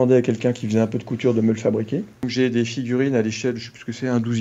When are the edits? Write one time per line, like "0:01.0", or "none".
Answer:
0:02.2